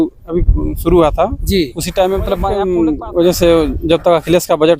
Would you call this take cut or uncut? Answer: cut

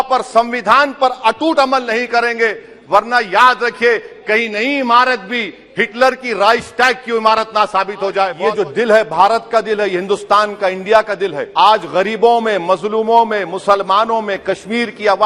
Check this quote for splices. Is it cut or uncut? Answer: cut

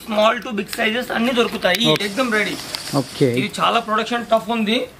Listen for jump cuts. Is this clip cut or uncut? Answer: cut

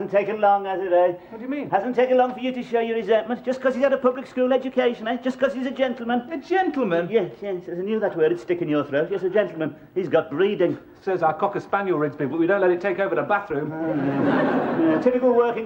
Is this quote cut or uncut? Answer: uncut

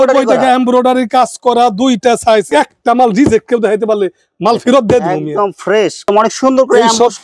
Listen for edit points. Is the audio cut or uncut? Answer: cut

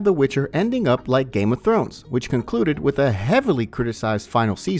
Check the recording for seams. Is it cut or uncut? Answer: uncut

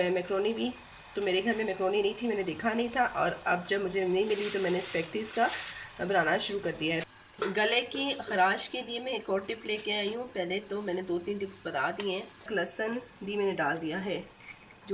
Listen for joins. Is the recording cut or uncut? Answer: cut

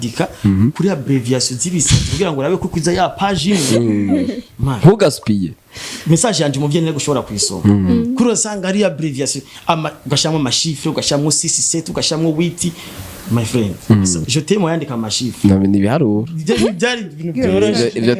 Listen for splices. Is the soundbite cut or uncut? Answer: uncut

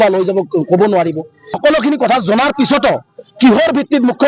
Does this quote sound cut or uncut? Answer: cut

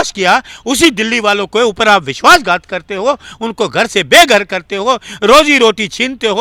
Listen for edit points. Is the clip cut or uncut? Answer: uncut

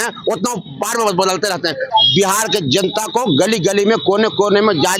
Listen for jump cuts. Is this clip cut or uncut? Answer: cut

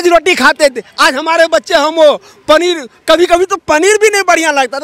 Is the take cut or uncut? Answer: uncut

